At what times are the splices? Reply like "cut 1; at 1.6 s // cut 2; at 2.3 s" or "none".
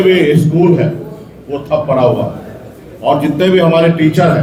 none